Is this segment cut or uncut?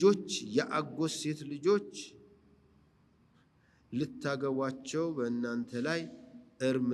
uncut